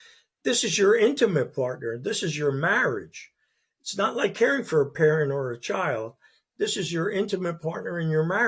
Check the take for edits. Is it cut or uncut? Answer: uncut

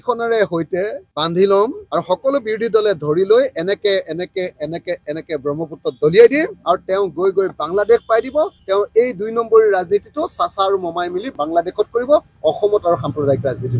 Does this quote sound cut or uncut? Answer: uncut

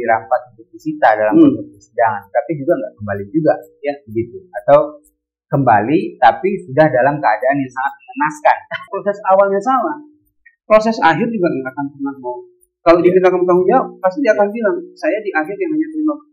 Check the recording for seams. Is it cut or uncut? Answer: cut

